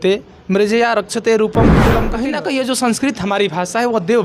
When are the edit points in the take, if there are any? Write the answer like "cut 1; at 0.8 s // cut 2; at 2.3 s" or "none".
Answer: cut 1; at 2.1 s